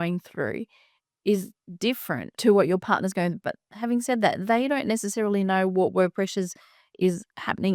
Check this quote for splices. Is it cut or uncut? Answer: uncut